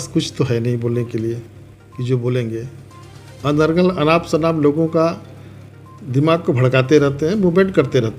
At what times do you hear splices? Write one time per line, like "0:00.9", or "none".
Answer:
none